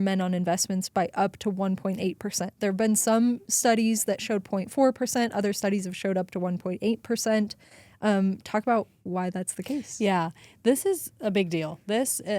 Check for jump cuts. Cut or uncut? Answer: uncut